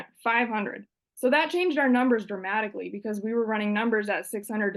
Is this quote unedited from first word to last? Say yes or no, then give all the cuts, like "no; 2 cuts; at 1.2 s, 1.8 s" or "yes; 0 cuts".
yes; 0 cuts